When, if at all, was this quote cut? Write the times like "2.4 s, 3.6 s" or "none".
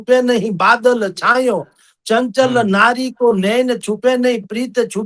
none